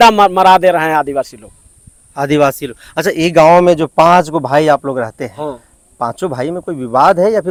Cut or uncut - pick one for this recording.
uncut